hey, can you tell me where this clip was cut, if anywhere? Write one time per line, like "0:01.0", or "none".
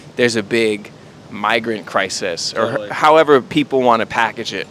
0:03.5